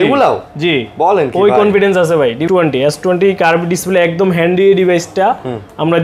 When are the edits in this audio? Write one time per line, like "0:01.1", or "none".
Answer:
0:02.4